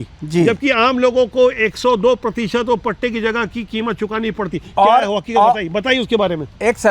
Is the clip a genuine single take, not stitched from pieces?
yes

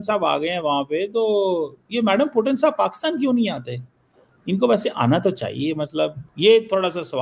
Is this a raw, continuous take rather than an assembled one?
yes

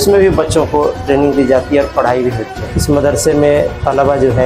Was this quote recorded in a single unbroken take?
no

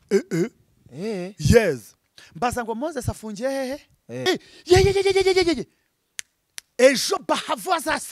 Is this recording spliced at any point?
yes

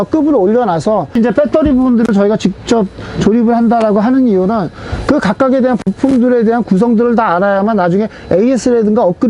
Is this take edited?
yes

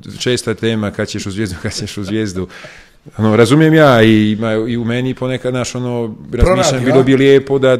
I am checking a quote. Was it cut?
no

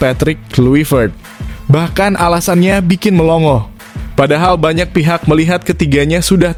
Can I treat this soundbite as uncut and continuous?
yes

